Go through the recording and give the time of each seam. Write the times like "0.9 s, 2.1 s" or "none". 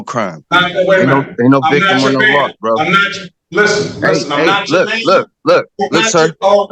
none